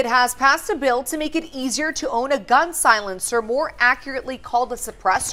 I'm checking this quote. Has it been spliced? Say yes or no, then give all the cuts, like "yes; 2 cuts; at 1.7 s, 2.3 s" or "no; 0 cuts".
no; 0 cuts